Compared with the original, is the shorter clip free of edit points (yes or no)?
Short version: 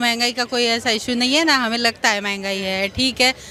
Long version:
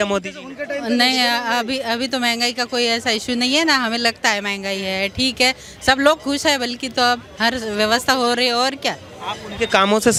yes